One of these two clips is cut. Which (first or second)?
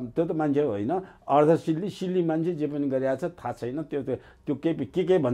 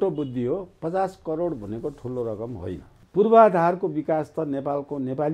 second